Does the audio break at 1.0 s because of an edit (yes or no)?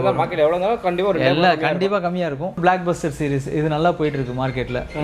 no